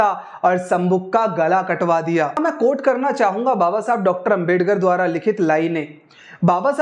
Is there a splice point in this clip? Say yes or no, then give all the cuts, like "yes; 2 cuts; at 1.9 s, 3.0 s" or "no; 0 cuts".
yes; 1 cut; at 2.4 s